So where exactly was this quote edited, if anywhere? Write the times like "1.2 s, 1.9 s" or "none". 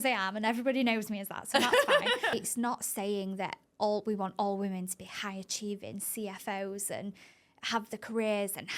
2.3 s

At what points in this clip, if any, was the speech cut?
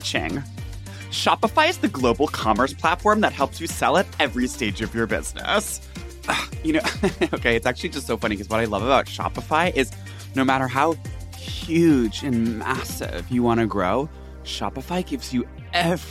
5.9 s

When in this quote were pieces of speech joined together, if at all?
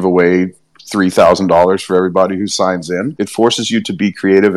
3.2 s

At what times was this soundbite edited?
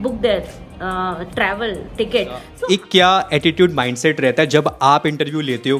2.5 s

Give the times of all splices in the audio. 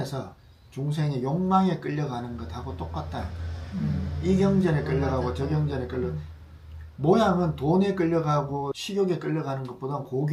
none

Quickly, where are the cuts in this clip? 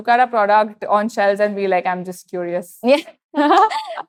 none

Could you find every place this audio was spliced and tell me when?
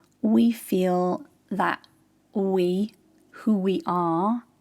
none

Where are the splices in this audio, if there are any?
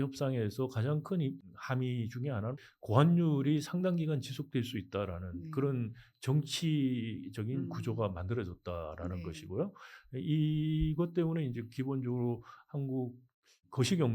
1.6 s

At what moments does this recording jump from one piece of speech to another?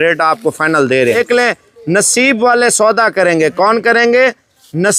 1.2 s

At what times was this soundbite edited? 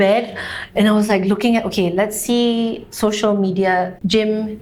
none

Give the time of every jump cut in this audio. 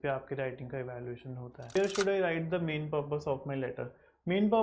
1.8 s

